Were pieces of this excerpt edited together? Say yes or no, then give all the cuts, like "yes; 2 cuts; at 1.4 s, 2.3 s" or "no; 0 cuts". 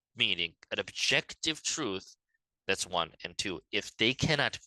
no; 0 cuts